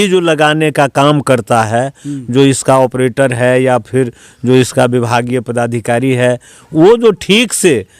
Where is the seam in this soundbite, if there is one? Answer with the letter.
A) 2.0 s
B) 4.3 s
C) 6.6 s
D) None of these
C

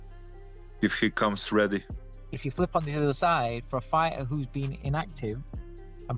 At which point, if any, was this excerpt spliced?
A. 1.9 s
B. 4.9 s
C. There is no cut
A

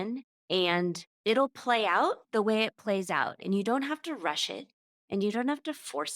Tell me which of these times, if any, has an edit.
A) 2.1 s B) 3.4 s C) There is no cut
B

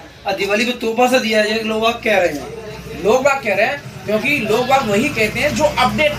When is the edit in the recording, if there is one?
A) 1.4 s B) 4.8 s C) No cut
C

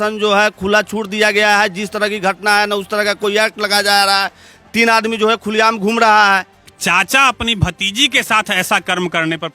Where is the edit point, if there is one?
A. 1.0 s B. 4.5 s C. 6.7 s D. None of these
C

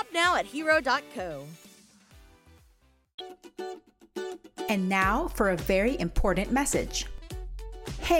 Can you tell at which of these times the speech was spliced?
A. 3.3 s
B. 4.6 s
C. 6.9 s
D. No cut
D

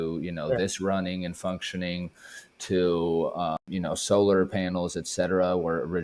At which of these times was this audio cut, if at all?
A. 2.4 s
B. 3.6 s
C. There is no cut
B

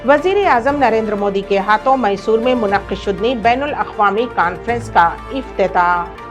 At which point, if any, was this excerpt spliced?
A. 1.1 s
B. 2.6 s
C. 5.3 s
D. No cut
D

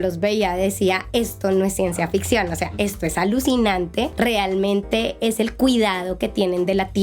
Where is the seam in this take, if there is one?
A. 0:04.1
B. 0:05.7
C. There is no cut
A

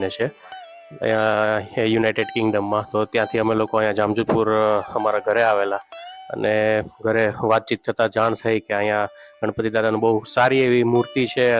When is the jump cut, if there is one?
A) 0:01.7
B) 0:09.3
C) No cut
C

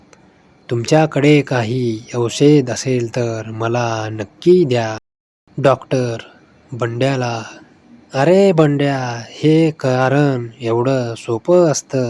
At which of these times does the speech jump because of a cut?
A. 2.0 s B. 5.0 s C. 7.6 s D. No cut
D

